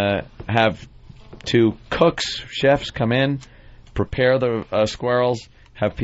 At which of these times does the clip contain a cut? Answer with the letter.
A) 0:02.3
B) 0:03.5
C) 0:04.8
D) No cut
A